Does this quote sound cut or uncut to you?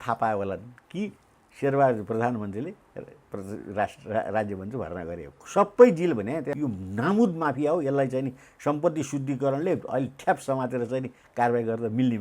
cut